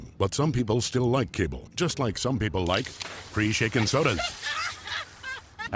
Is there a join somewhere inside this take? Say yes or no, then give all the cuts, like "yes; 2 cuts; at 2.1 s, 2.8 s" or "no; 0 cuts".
no; 0 cuts